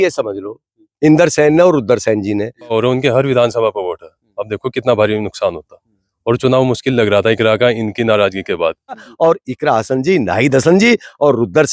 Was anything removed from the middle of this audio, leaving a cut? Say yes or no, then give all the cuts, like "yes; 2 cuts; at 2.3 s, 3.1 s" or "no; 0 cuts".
yes; 2 cuts; at 2.7 s, 9.1 s